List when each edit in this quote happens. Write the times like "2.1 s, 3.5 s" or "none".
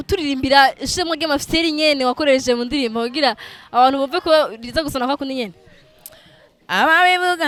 none

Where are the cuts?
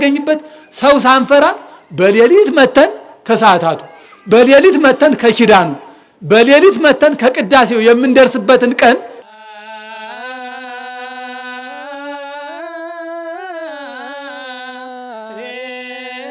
9.2 s

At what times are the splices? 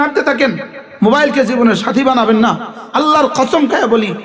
none

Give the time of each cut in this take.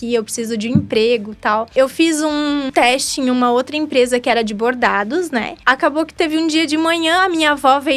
1.7 s, 2.7 s, 5.5 s

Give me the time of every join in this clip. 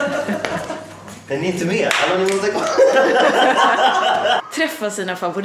4.4 s

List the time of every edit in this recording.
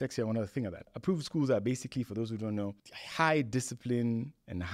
0.9 s

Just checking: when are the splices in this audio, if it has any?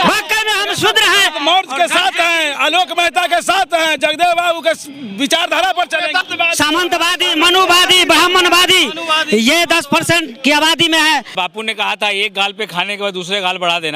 6.2 s, 11.3 s

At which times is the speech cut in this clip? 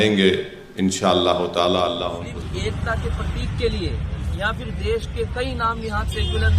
2.3 s

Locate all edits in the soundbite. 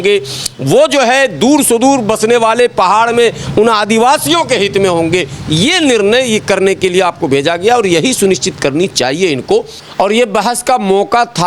9.8 s

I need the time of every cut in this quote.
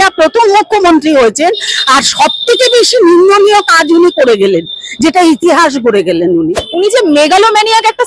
6.6 s

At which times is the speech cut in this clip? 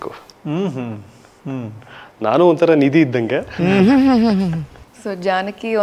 none

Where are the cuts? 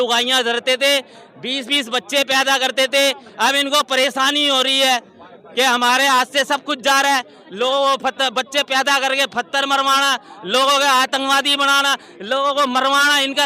none

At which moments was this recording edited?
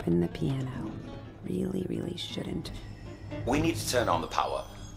3.4 s

